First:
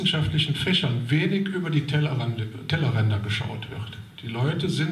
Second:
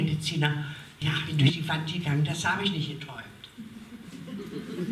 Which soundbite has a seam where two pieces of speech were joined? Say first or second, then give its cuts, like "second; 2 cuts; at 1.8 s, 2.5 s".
second; 1 cut; at 1.5 s